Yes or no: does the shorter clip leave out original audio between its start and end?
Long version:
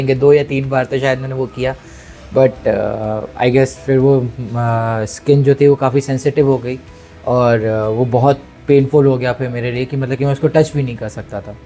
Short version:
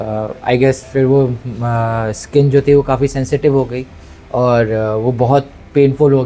no